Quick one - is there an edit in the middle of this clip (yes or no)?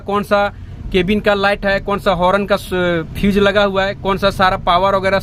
no